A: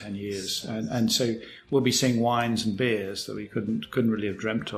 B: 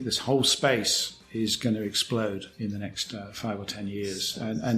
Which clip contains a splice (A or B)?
B